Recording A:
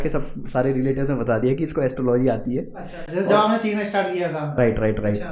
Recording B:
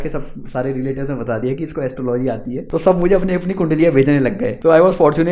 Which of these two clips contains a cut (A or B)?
B